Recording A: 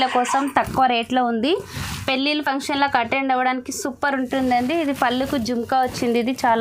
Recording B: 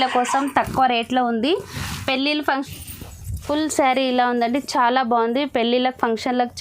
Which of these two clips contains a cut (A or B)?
B